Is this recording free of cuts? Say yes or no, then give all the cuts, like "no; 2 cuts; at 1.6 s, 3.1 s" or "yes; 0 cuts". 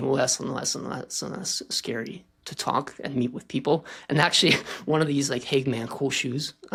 yes; 0 cuts